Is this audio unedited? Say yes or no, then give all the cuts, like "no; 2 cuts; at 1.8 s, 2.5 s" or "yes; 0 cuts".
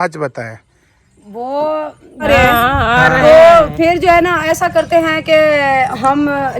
no; 1 cut; at 2.2 s